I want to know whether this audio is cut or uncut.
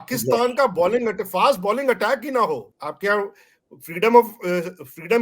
cut